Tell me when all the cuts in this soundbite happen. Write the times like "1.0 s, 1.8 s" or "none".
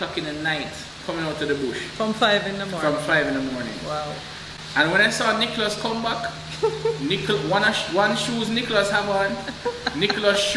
none